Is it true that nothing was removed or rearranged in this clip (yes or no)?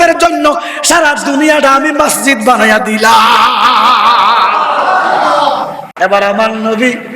no